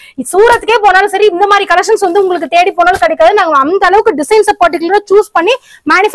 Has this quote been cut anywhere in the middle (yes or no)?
no